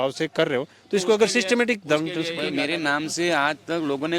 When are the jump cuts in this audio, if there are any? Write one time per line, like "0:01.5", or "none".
0:02.6